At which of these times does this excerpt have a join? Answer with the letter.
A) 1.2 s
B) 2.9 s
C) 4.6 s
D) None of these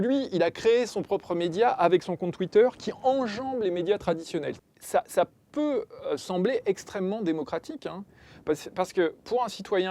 C